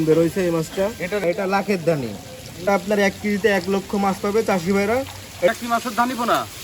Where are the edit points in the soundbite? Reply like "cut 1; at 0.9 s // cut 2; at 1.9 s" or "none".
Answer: cut 1; at 1.2 s // cut 2; at 2.6 s // cut 3; at 5.5 s